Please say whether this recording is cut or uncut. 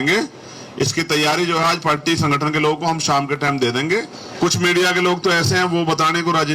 cut